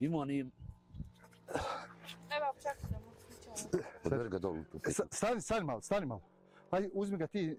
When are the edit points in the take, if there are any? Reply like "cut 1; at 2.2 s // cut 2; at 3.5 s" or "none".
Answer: none